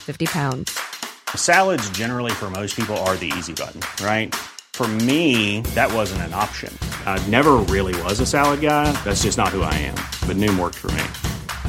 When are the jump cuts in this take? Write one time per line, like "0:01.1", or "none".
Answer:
none